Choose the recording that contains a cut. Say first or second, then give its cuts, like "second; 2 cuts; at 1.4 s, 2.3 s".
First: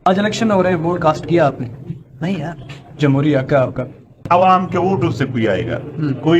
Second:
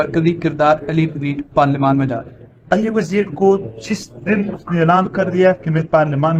first; 1 cut; at 4.2 s